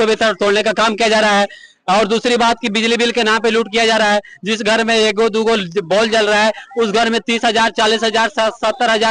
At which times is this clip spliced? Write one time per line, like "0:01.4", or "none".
none